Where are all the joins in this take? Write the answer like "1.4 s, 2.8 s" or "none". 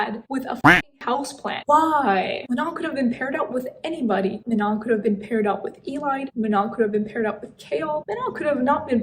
none

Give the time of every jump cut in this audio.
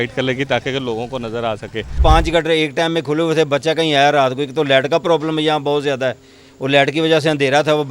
1.9 s

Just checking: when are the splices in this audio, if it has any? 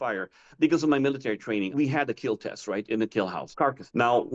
1.7 s, 3.4 s

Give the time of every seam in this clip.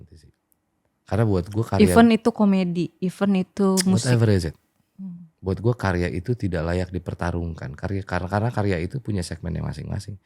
none

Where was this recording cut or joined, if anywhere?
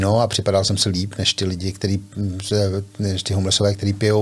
none

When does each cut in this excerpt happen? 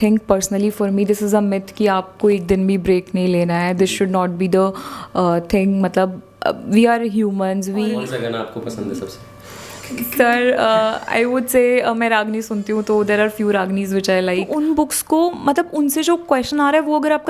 8.0 s, 14.5 s

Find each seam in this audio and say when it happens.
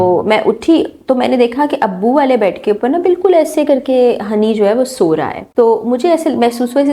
5.4 s

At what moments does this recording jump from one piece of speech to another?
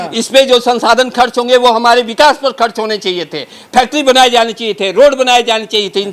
none

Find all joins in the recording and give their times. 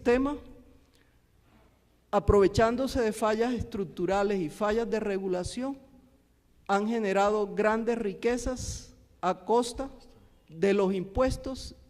5.3 s

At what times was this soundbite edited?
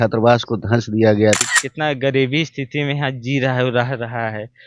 1.6 s

